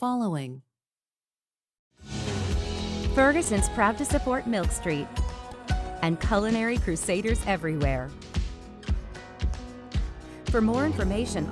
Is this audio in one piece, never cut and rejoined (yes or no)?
yes